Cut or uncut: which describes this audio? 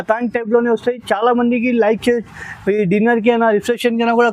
uncut